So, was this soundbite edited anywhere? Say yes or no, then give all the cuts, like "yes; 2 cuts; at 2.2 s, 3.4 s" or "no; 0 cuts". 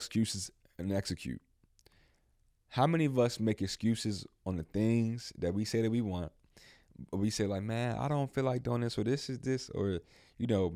no; 0 cuts